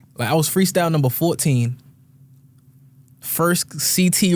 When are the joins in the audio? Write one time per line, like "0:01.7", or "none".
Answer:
none